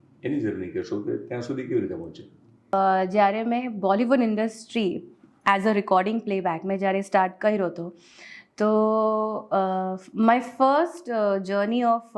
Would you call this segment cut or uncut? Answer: cut